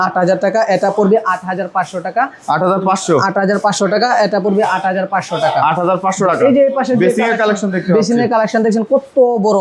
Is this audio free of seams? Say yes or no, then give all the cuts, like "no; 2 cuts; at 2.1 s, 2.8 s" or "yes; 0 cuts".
yes; 0 cuts